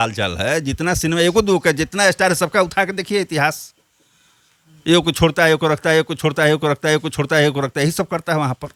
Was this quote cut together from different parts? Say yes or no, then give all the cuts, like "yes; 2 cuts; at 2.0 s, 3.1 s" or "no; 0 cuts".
no; 0 cuts